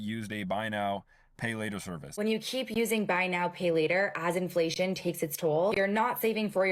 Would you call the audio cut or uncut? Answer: cut